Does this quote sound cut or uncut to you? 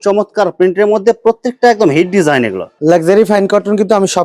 uncut